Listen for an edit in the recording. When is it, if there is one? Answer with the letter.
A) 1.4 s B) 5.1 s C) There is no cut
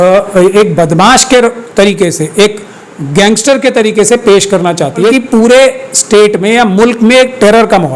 B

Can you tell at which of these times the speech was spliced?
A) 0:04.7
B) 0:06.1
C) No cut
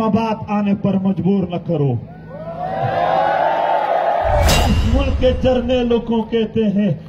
A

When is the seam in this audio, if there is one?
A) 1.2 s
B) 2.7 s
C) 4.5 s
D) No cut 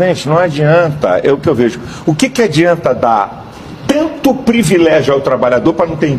D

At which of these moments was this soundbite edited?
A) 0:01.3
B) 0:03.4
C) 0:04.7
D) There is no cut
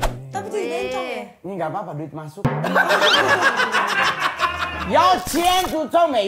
C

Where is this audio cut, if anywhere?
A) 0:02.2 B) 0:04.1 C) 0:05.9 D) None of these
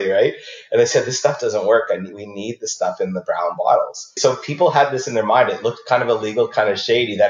B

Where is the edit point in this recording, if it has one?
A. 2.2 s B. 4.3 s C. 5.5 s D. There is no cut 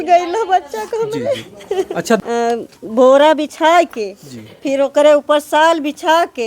A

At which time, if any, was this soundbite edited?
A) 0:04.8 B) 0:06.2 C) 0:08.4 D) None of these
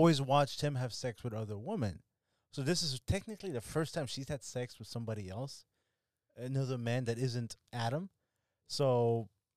D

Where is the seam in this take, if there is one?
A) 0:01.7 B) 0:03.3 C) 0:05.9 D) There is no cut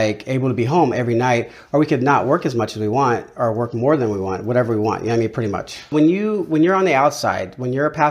C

